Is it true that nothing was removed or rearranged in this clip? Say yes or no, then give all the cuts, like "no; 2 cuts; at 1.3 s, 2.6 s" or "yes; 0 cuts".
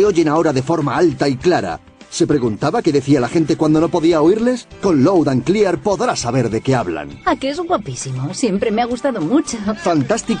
yes; 0 cuts